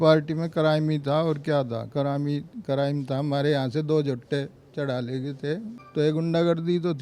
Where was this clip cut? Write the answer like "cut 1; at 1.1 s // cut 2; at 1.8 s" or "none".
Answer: cut 1; at 5.8 s